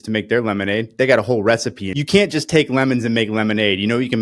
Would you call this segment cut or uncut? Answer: cut